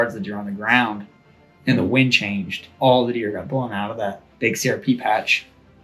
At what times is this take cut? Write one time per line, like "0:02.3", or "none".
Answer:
0:02.6